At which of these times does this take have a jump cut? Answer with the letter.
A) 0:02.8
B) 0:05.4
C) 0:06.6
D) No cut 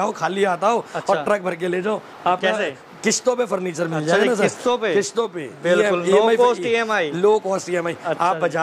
D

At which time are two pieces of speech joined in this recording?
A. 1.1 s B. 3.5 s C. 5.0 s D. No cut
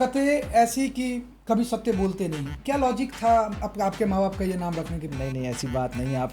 C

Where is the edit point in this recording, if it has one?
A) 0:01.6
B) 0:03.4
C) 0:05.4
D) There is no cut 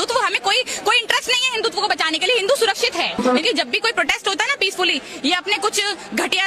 B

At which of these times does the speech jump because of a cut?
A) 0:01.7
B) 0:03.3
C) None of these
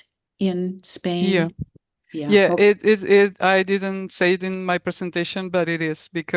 C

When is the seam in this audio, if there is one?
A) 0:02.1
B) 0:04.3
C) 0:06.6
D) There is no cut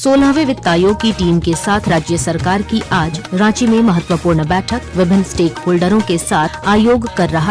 C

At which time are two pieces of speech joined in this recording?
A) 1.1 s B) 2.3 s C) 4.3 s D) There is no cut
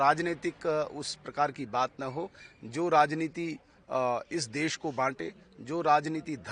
D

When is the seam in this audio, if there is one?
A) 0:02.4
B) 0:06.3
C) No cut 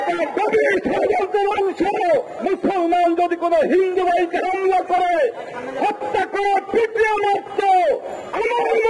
A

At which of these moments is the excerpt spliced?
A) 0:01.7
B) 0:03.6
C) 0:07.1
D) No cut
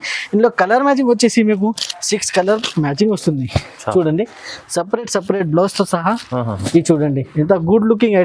D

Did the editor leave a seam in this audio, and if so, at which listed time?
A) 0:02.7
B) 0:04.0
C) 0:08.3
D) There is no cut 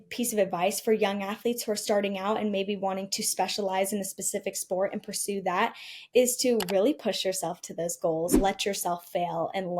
C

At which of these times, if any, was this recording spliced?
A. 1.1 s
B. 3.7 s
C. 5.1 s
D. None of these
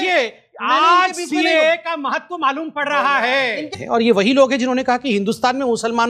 B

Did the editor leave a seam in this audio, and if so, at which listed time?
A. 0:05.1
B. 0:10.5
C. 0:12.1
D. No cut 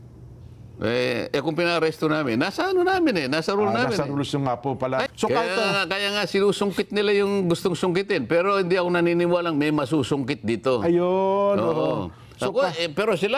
A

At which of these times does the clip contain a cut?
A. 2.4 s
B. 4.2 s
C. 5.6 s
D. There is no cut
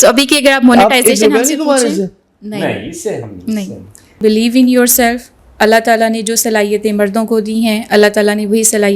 B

